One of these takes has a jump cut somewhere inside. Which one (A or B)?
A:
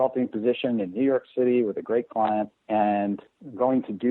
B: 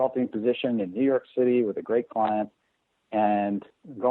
A